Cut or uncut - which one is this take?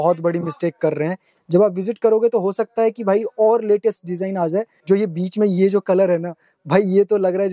cut